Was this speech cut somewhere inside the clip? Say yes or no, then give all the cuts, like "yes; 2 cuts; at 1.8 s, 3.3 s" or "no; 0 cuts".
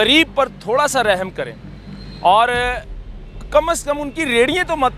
no; 0 cuts